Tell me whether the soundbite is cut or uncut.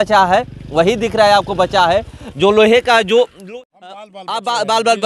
cut